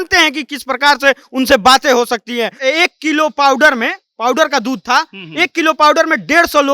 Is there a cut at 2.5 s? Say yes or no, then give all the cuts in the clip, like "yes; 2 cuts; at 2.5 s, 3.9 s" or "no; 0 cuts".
yes; 1 cut; at 2.5 s